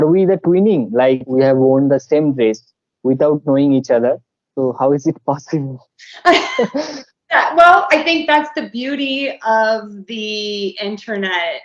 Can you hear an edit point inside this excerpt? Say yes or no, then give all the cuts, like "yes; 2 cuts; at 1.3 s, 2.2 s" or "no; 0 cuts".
yes; 1 cut; at 1.2 s